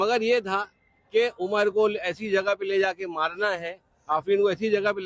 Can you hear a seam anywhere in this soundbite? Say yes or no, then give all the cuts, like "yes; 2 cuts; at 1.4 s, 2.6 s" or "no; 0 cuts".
no; 0 cuts